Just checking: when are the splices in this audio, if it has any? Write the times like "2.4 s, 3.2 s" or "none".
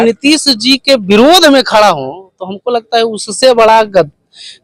none

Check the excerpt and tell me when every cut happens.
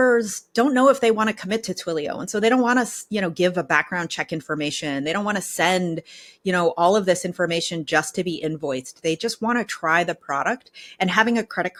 none

